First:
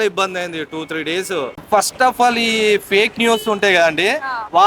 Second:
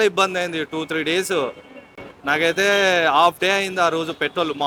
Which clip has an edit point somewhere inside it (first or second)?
first